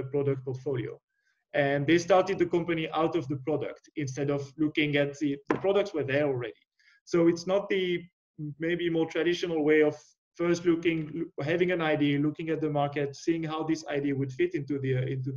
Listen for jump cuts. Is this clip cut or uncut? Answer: uncut